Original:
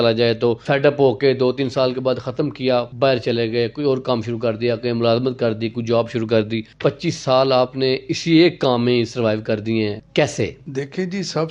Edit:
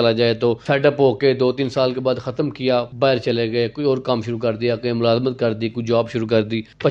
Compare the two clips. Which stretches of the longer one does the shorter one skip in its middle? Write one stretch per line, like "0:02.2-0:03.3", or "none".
none